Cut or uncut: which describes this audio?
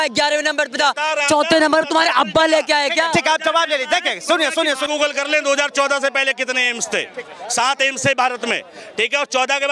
cut